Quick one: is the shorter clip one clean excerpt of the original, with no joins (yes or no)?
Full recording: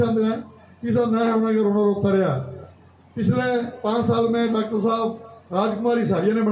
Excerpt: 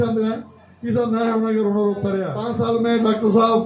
no